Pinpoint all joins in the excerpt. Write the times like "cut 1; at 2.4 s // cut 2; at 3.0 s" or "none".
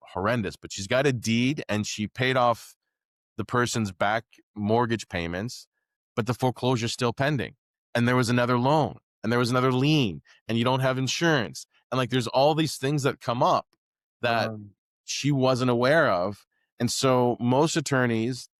none